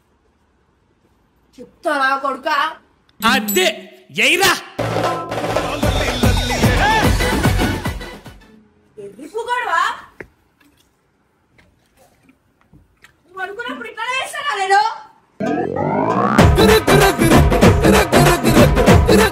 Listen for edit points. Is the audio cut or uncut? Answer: uncut